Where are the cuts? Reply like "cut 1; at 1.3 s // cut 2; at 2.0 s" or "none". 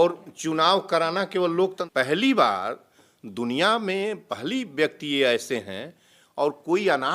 cut 1; at 1.8 s